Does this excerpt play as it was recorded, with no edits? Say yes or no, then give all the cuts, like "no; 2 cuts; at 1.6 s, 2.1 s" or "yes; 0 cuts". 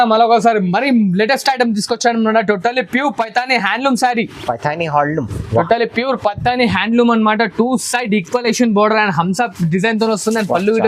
yes; 0 cuts